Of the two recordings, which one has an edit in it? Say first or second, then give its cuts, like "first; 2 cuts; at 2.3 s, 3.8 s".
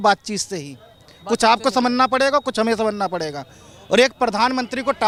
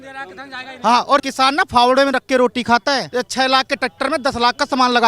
second; 2 cuts; at 1.3 s, 3.1 s